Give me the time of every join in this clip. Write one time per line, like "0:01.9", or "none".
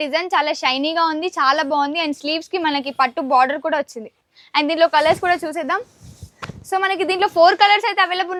none